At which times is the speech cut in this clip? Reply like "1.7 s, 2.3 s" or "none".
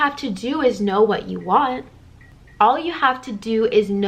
2.4 s